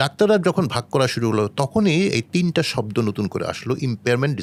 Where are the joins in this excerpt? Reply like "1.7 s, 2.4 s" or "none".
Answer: none